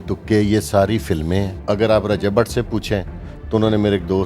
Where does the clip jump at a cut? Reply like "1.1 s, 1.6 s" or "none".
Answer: 1.5 s